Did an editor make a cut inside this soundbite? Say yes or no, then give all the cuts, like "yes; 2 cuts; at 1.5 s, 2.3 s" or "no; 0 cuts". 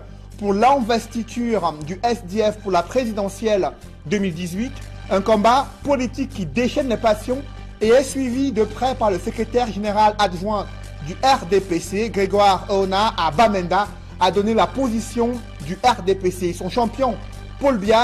yes; 1 cut; at 1.2 s